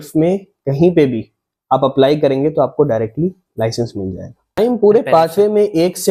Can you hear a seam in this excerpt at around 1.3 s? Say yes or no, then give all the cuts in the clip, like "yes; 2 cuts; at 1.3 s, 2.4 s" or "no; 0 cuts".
no; 1 cut; at 4.6 s